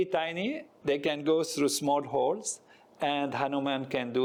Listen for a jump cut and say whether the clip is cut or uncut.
uncut